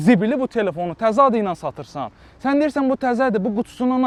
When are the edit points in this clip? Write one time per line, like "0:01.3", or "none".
none

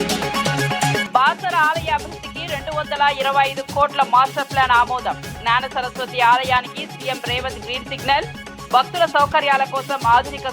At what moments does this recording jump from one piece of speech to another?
0:01.0

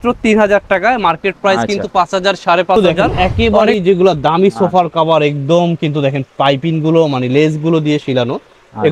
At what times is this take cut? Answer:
0:02.8

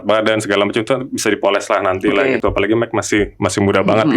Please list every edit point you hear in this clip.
0:02.4

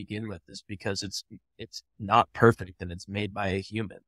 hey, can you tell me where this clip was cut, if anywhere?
none

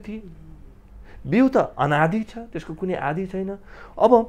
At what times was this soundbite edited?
none

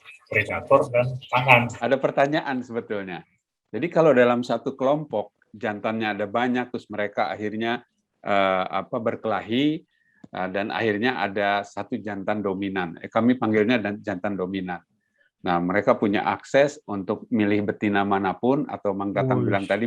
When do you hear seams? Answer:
0:01.7

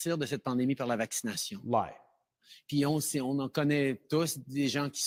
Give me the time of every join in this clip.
none

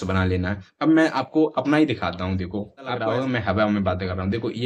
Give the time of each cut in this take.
0:03.0

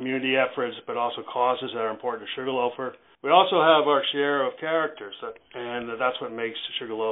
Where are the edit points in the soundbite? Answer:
0:03.0

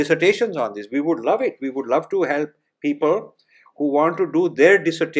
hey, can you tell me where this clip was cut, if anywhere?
none

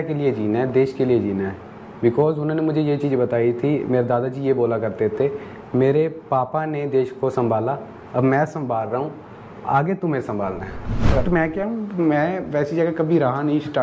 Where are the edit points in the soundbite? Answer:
0:11.1

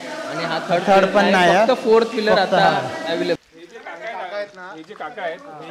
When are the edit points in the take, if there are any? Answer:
0:03.4

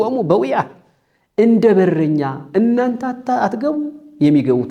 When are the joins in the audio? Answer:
none

